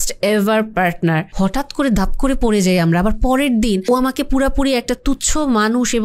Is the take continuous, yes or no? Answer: no